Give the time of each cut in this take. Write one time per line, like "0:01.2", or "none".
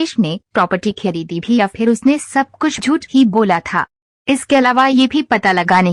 0:02.8